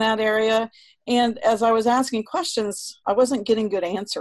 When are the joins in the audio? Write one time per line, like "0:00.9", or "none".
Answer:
0:03.0